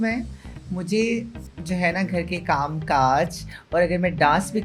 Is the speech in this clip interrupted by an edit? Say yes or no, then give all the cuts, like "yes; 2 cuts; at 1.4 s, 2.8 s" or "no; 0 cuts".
no; 0 cuts